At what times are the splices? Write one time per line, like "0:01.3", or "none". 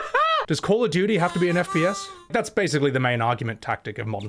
0:02.3